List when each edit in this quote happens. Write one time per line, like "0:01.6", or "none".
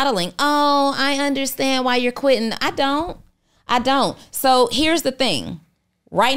none